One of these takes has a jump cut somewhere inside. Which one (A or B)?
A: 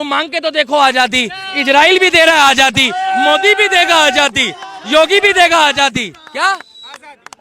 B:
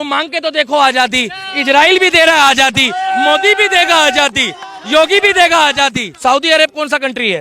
B